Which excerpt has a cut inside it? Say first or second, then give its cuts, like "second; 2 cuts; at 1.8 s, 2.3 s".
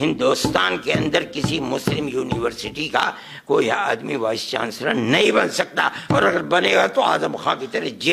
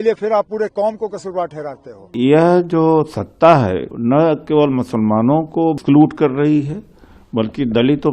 second; 3 cuts; at 2.1 s, 3.9 s, 5.8 s